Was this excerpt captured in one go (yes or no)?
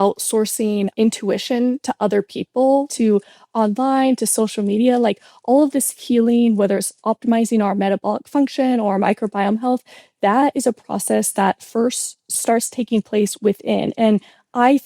no